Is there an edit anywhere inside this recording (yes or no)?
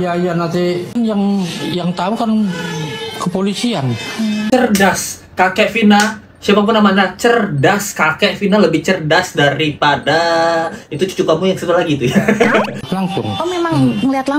yes